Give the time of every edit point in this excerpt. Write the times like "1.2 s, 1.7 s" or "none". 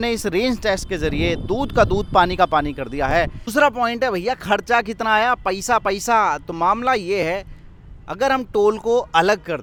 none